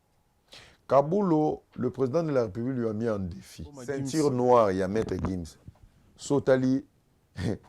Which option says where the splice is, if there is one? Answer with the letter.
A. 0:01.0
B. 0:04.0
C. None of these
B